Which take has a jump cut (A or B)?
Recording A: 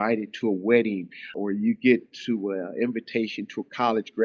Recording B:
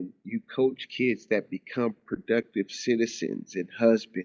A